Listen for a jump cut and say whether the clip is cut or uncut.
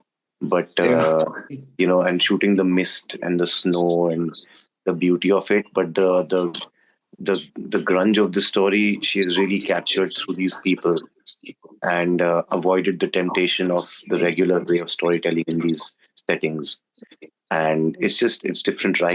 uncut